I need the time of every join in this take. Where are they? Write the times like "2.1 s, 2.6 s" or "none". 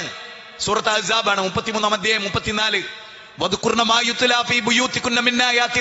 none